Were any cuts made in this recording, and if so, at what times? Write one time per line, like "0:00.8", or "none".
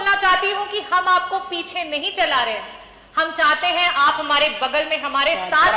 none